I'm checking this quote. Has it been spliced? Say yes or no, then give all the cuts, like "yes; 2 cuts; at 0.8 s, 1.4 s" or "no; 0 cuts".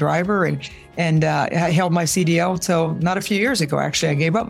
no; 0 cuts